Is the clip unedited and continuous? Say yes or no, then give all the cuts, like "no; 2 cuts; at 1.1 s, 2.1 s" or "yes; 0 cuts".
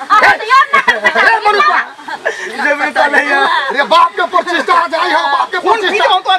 yes; 0 cuts